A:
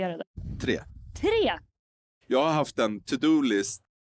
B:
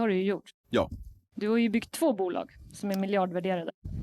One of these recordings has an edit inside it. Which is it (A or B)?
A